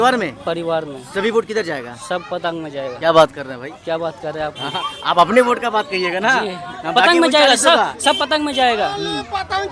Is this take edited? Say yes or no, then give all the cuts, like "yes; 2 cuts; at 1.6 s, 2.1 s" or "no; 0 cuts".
no; 0 cuts